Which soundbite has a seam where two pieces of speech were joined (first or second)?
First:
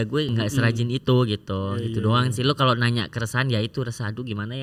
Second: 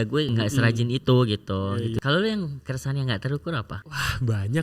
second